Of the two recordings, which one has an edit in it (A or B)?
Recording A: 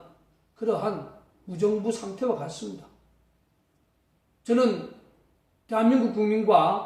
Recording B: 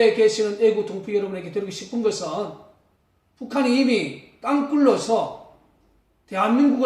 B